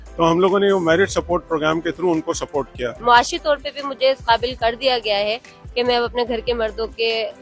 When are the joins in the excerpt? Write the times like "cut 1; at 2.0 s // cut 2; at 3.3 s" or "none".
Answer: cut 1; at 3.0 s